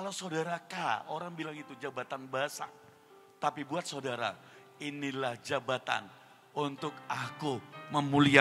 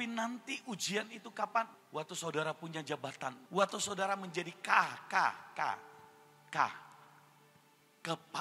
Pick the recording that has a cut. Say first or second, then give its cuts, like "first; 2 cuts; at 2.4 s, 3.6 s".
second; 2 cuts; at 1.8 s, 3.4 s